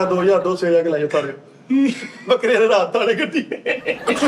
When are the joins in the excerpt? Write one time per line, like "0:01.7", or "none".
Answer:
none